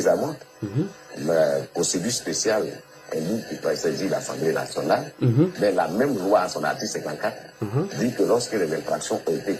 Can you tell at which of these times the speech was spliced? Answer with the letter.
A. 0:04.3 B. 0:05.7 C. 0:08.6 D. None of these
D